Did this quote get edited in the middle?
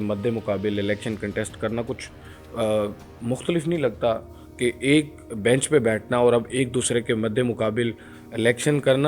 no; 0 cuts

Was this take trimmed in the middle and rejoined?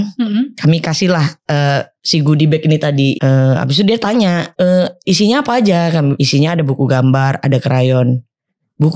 yes; 3 cuts; at 3.1 s, 4.5 s, 6.2 s

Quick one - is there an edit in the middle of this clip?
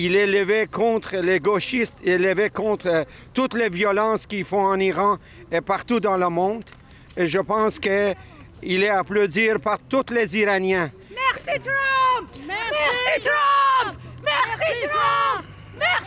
no; 0 cuts

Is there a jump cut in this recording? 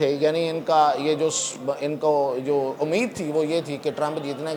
no; 0 cuts

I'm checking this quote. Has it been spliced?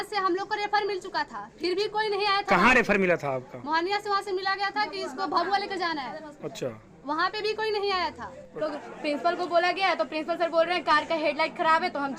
yes; 1 cut; at 8.6 s

